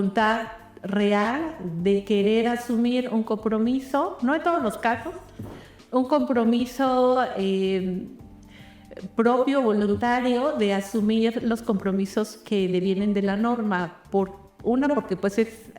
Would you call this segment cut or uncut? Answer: uncut